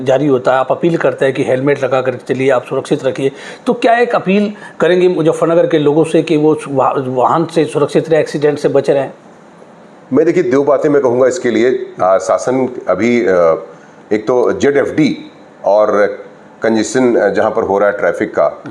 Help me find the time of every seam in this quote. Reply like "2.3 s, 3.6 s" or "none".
none